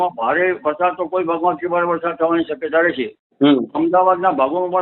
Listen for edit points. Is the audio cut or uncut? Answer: uncut